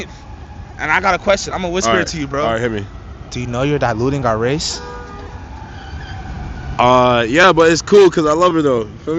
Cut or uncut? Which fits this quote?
uncut